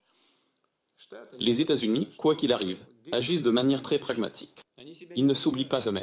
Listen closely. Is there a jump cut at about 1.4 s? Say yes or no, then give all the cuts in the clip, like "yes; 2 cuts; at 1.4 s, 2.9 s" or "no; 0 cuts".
yes; 1 cut; at 1.4 s